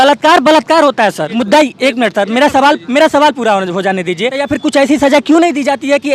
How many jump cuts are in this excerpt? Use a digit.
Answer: 2